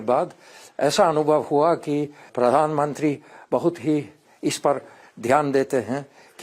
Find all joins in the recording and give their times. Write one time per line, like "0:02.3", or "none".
0:02.3
0:04.2